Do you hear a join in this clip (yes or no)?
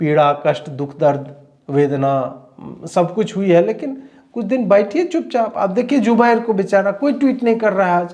no